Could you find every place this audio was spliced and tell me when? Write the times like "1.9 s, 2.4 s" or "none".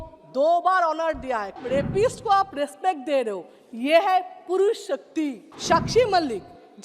1.6 s, 5.5 s